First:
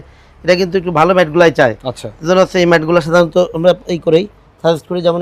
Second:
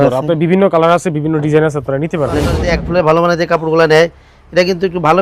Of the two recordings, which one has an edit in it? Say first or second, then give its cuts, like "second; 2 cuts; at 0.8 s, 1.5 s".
second; 1 cut; at 2.6 s